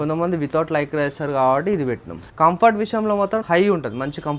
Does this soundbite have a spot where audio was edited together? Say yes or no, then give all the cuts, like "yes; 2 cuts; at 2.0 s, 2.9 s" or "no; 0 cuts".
no; 0 cuts